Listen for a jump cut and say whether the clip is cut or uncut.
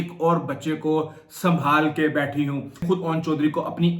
cut